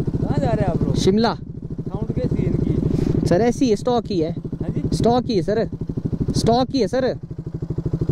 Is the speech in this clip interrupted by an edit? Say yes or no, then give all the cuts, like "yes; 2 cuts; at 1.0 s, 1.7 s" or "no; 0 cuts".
no; 0 cuts